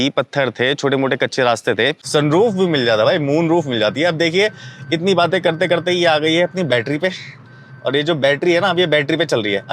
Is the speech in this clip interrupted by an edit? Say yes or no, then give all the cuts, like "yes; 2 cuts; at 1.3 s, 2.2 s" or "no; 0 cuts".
yes; 1 cut; at 2.0 s